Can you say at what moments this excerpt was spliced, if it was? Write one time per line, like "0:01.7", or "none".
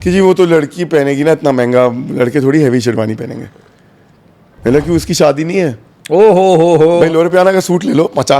0:07.0